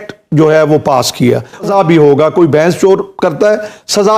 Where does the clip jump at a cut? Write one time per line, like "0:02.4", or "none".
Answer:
0:01.6